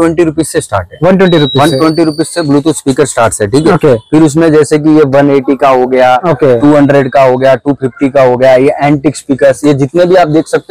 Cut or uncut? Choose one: uncut